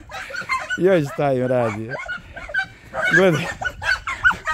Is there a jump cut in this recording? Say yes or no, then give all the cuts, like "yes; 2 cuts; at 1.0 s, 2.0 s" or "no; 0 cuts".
no; 0 cuts